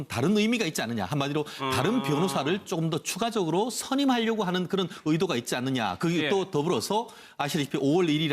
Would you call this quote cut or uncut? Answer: cut